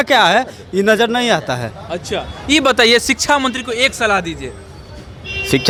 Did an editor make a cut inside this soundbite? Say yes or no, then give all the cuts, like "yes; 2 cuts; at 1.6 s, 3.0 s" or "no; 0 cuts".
no; 0 cuts